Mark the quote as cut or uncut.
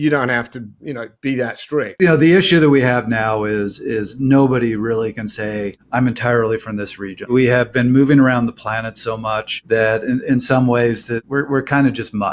cut